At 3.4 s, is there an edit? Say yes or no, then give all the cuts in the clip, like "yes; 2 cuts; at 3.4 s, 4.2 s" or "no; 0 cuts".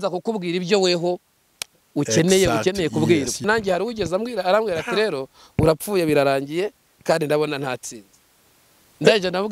yes; 1 cut; at 3.4 s